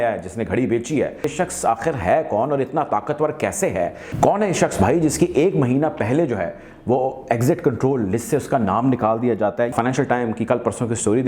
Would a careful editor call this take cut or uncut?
cut